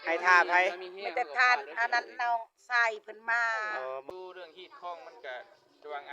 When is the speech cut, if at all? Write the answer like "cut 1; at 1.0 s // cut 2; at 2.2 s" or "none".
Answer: cut 1; at 4.1 s